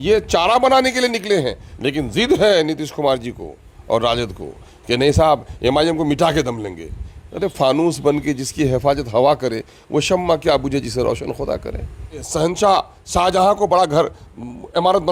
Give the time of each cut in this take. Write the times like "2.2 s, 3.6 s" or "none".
1.6 s, 12.2 s